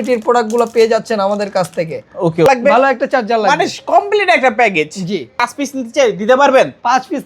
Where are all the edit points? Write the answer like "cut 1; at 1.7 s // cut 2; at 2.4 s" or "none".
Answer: cut 1; at 2.5 s // cut 2; at 5.4 s